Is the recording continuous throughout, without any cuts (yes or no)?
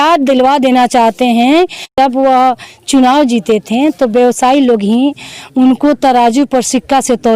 no